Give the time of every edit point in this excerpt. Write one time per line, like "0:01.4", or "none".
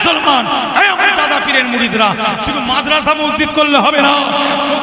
none